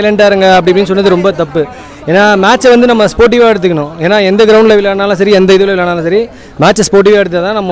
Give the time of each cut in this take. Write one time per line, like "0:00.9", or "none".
none